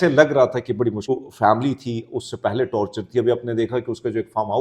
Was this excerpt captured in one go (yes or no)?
no